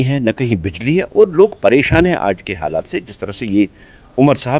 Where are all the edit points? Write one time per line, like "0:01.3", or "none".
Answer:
none